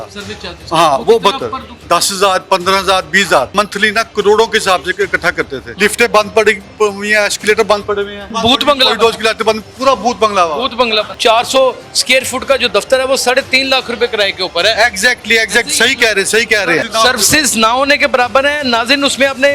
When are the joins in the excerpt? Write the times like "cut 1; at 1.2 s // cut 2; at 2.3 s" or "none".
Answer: cut 1; at 1.8 s // cut 2; at 3.5 s // cut 3; at 5.6 s // cut 4; at 8.3 s // cut 5; at 11.1 s // cut 6; at 16.9 s